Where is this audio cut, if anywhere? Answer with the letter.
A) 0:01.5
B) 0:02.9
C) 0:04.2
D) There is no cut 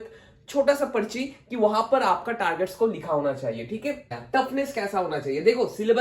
C